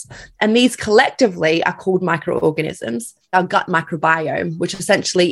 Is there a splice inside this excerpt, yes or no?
yes